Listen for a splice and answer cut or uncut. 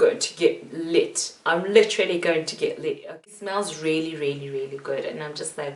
cut